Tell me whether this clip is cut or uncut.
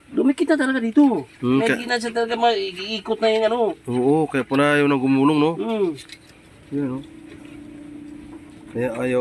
uncut